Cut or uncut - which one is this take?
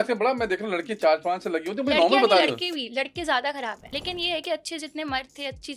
cut